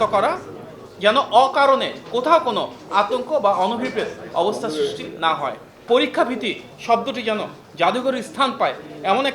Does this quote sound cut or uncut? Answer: cut